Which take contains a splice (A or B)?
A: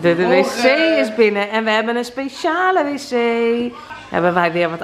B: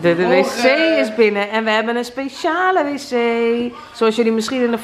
A